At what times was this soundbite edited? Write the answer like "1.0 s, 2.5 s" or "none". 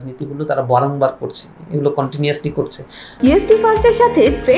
3.0 s